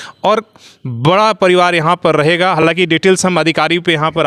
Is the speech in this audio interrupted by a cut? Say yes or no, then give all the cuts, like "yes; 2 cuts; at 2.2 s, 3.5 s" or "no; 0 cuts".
no; 0 cuts